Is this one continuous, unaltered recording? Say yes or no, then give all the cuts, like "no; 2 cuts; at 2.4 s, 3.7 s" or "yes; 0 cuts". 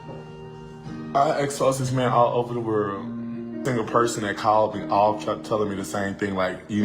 no; 1 cut; at 3.6 s